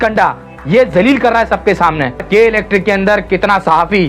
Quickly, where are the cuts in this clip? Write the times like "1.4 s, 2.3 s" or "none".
2.2 s